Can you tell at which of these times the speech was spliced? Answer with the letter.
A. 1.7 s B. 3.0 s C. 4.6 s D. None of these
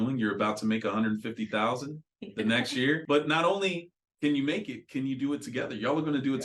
B